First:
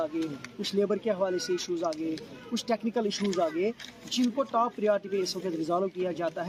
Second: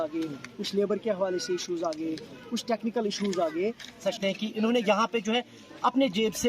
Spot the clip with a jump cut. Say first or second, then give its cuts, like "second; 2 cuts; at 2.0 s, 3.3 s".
second; 1 cut; at 4.4 s